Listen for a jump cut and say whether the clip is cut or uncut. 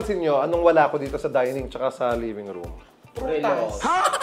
uncut